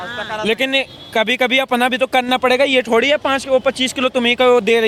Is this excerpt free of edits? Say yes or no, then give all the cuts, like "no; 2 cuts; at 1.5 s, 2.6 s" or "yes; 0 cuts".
yes; 0 cuts